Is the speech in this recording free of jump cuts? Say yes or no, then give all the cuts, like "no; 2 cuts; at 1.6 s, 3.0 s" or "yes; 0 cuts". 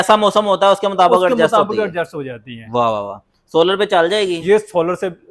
yes; 0 cuts